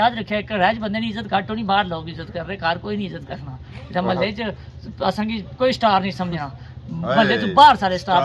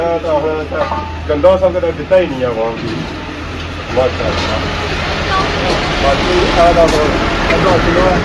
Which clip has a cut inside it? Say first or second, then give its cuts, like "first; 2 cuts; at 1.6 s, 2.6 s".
second; 1 cut; at 3.8 s